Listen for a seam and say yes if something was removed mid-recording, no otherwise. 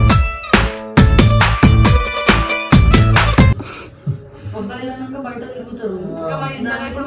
no